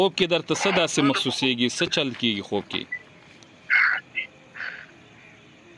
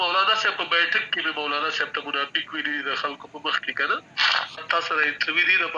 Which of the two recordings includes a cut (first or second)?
second